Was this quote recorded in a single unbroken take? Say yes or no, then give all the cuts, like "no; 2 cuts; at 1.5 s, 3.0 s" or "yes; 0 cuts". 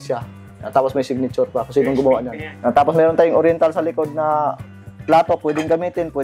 no; 1 cut; at 2.4 s